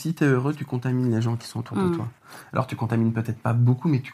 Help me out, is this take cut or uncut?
uncut